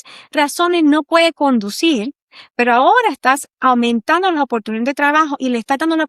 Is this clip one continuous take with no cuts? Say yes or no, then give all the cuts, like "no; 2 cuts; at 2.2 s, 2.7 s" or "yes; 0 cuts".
yes; 0 cuts